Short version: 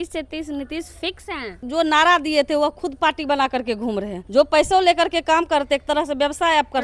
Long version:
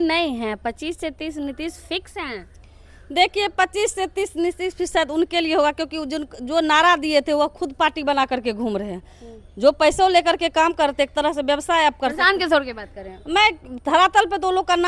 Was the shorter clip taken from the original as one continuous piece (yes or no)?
no